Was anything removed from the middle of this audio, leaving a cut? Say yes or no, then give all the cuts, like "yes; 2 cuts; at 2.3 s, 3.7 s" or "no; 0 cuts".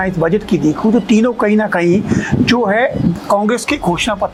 no; 0 cuts